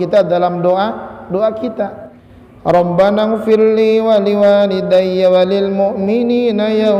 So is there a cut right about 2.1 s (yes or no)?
yes